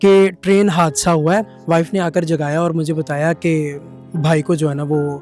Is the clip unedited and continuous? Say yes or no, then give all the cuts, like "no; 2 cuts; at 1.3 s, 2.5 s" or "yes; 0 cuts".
no; 1 cut; at 1.5 s